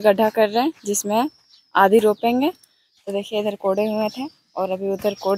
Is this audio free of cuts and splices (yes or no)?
yes